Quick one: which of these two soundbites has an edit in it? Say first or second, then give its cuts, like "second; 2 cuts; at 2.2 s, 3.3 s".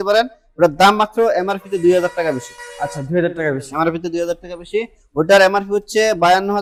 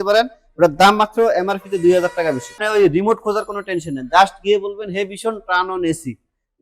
second; 1 cut; at 2.6 s